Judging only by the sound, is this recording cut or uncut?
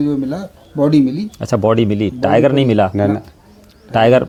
uncut